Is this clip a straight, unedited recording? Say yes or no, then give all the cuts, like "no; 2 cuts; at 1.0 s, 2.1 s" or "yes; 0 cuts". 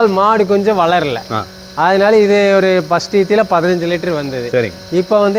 yes; 0 cuts